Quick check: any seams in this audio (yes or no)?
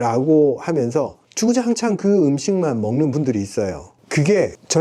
no